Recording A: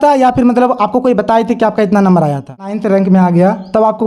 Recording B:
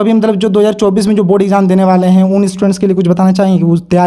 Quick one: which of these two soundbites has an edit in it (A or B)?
A